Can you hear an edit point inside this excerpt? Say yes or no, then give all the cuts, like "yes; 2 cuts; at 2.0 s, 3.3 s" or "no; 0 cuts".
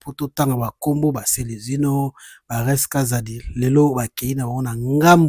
no; 0 cuts